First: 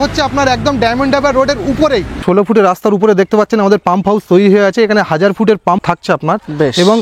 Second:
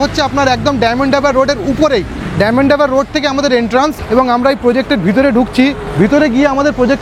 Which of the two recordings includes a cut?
first; 2 cuts; at 2.2 s, 5.8 s

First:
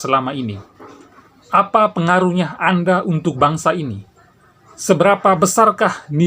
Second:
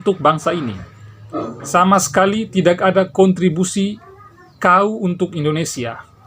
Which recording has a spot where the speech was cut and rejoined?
second; 1 cut; at 1.6 s

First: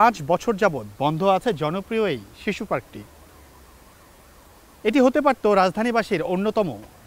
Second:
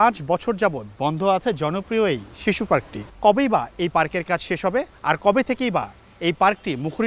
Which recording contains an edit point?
second; 2 cuts; at 3.0 s, 4.9 s

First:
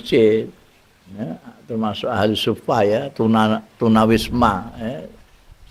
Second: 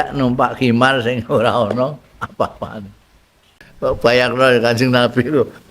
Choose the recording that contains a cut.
second; 1 cut; at 3.6 s

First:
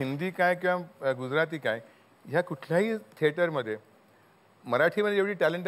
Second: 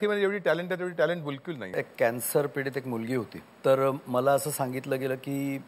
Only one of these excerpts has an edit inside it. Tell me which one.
second; 2 cuts; at 1.8 s, 3.4 s

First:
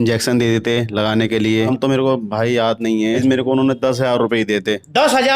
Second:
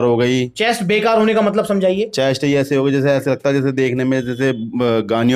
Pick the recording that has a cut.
first; 2 cuts; at 1.7 s, 3.2 s

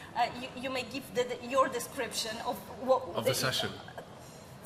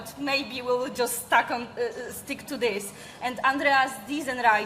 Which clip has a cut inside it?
second; 1 cut; at 1.9 s

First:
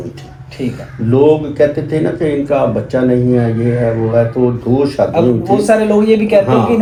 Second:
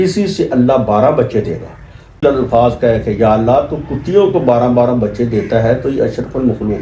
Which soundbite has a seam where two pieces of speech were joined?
second; 1 cut; at 2.2 s

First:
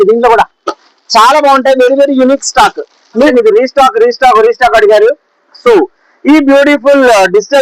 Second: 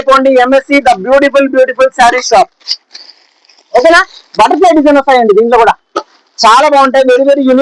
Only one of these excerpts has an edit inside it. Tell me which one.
first; 1 cut; at 3.3 s

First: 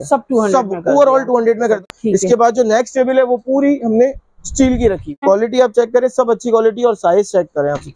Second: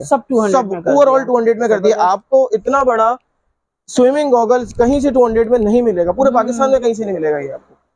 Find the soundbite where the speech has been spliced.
first; 2 cuts; at 1.8 s, 5.2 s

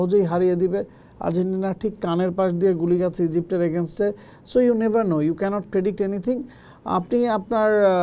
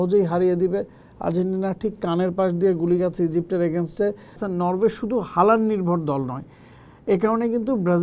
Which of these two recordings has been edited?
second; 1 cut; at 4.4 s

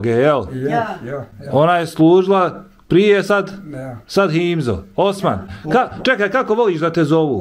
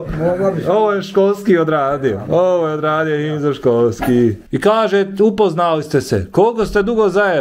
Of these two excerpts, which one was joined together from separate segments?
second; 1 cut; at 4.5 s

